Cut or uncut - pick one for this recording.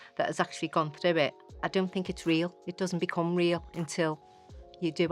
cut